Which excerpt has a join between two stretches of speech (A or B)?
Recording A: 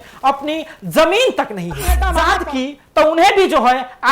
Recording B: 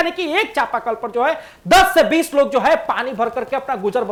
A